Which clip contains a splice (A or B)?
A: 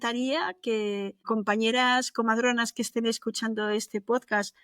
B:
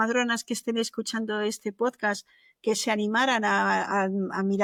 A